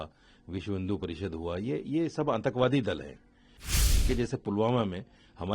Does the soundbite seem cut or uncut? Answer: cut